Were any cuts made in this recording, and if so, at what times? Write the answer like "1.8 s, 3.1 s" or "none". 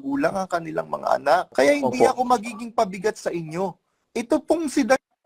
1.5 s